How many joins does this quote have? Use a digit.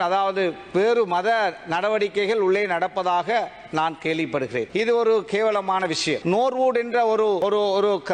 1